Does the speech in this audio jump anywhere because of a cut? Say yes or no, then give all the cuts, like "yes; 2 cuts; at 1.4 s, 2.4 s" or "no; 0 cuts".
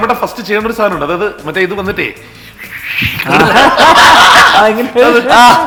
no; 0 cuts